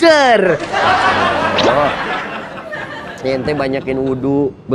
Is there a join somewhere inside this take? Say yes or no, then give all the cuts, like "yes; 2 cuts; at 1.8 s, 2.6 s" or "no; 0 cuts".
no; 0 cuts